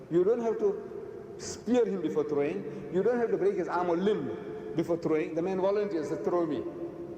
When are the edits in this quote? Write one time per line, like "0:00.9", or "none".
0:01.6